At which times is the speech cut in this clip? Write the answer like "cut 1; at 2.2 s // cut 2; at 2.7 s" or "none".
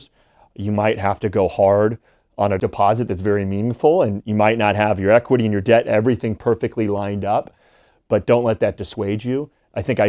cut 1; at 2.6 s